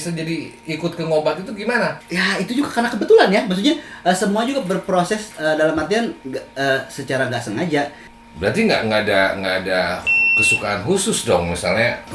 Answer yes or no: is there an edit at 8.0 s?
yes